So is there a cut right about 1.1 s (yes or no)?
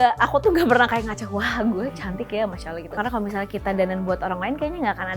no